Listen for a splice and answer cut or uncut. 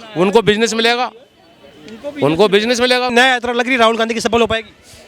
cut